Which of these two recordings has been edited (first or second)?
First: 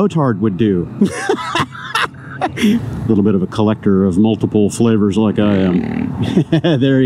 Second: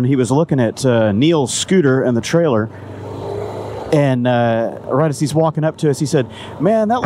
first